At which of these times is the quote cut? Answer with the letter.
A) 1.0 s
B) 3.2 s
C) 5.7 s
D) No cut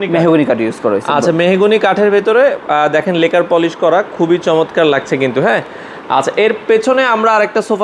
D